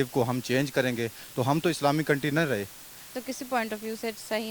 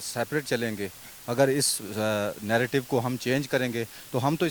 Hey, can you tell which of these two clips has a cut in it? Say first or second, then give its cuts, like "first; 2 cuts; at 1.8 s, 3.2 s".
first; 1 cut; at 3.1 s